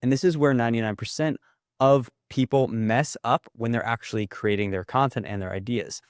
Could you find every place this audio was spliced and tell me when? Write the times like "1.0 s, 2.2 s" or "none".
none